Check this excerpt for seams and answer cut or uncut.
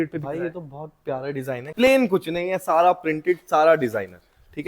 cut